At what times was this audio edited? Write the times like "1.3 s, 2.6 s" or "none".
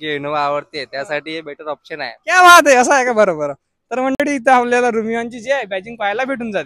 none